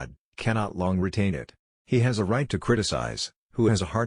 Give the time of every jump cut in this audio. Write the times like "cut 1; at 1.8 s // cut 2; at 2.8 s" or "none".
cut 1; at 1.5 s